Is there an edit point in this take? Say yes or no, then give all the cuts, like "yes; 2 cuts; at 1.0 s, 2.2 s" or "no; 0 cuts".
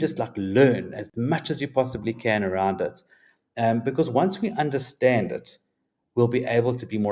no; 0 cuts